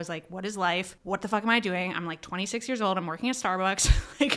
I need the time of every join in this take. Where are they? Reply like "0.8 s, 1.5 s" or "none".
1.0 s